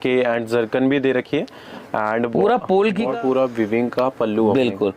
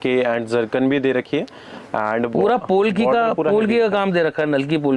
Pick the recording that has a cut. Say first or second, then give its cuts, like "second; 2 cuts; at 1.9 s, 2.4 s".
first; 1 cut; at 3.1 s